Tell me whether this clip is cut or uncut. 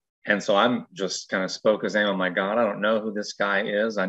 uncut